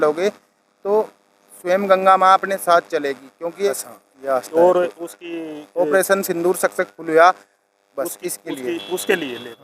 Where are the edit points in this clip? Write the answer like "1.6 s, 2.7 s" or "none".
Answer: 3.8 s